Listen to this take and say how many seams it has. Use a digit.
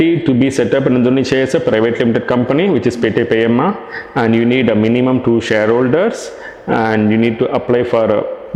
0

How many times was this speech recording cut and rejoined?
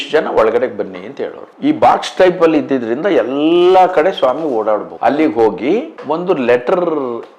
2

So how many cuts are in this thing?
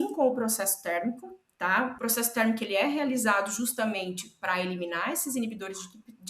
1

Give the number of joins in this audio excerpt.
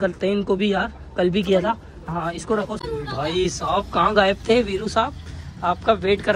1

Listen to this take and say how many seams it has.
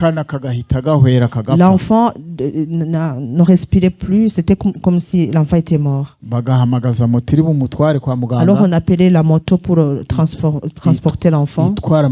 0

